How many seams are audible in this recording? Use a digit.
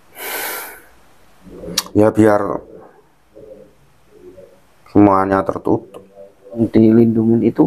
1